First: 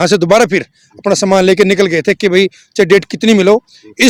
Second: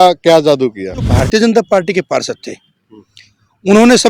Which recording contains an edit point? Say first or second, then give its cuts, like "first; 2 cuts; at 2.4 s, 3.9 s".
second; 1 cut; at 1.2 s